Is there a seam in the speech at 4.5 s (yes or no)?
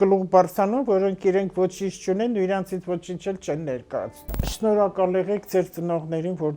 yes